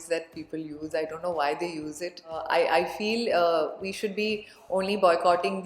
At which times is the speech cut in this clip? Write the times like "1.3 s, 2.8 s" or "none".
2.4 s